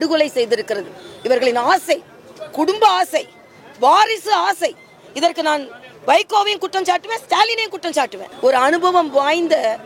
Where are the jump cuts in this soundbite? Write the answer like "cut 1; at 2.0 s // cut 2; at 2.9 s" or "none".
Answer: cut 1; at 8.3 s